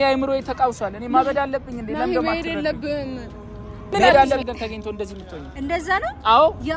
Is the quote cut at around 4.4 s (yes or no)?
yes